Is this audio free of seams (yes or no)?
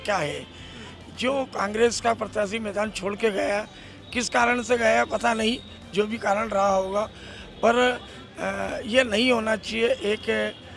yes